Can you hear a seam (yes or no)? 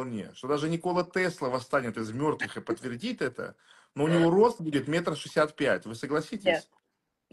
no